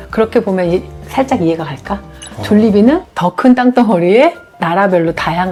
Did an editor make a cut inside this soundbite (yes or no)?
no